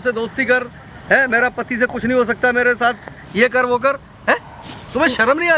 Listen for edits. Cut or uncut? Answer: uncut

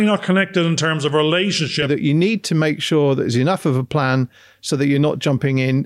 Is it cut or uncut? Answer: cut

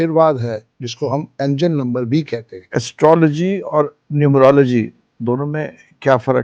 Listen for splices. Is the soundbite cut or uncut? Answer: cut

